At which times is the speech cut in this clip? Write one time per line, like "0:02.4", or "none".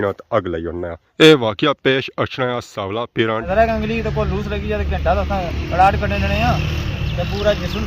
0:01.0
0:03.5